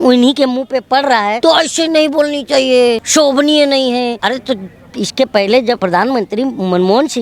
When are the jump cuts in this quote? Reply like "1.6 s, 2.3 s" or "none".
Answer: 1.4 s, 3.0 s, 4.2 s, 5.8 s